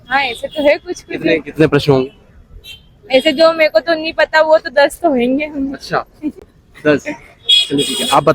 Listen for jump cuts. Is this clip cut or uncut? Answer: uncut